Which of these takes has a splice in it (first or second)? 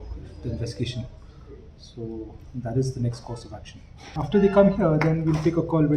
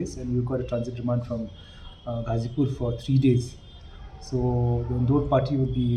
first